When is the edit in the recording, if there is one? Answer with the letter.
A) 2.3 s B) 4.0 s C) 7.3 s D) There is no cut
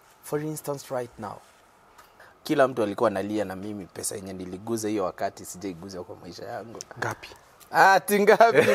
A